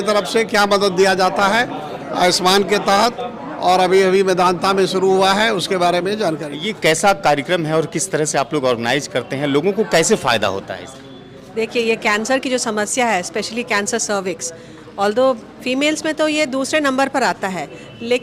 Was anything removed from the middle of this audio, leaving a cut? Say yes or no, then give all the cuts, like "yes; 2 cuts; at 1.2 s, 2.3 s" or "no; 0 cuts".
no; 0 cuts